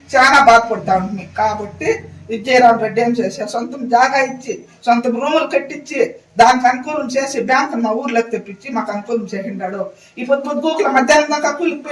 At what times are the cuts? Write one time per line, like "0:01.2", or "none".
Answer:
none